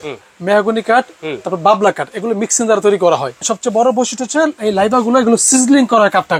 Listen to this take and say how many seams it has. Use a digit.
1